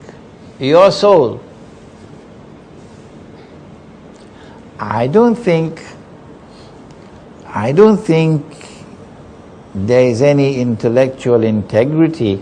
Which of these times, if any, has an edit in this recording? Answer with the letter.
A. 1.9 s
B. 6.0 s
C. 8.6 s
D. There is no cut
B